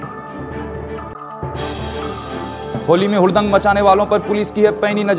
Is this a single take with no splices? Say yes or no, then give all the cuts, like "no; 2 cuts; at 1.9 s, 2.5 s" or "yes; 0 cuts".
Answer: no; 1 cut; at 1.0 s